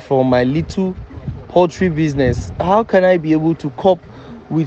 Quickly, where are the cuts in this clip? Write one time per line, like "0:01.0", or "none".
none